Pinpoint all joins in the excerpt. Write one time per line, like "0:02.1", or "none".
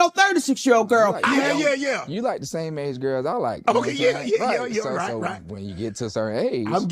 0:01.2